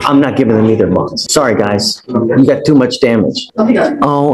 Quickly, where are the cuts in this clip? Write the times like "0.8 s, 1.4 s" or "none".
1.2 s, 3.4 s